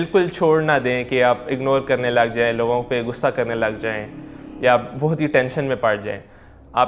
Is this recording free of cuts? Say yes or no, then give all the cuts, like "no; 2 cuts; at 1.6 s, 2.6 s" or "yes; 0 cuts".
yes; 0 cuts